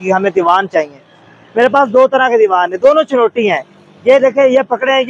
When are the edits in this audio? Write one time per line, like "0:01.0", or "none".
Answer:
none